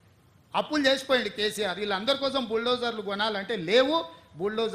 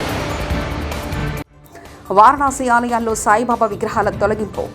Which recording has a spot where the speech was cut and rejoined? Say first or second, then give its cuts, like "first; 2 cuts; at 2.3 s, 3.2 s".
second; 1 cut; at 1.5 s